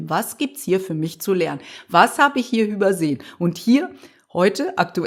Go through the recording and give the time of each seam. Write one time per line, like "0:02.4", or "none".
none